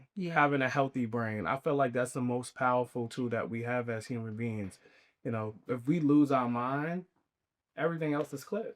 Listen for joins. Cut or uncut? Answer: uncut